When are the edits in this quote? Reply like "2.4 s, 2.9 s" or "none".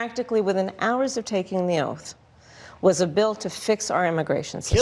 none